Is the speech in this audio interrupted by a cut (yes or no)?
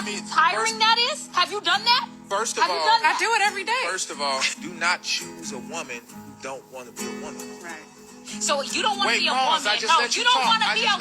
yes